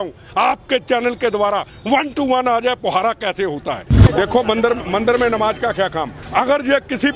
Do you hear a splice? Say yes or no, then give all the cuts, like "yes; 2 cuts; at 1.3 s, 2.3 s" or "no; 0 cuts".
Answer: yes; 1 cut; at 3.9 s